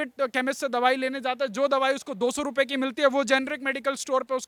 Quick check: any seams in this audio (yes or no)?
no